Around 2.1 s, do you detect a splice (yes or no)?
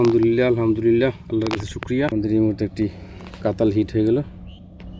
yes